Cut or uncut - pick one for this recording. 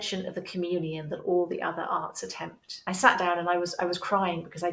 cut